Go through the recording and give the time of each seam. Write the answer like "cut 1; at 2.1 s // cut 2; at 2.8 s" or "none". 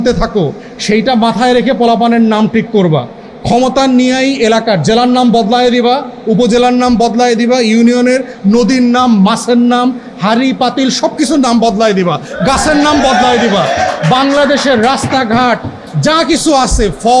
none